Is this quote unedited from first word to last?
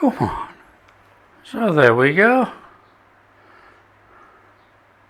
yes; 0 cuts

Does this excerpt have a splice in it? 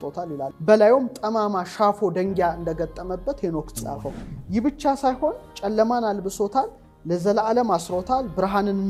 yes; 1 cut; at 3.8 s

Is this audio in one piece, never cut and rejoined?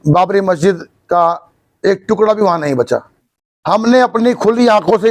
no; 1 cut; at 3.1 s

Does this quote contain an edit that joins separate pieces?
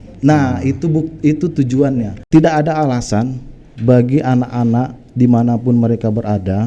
yes; 1 cut; at 2.2 s

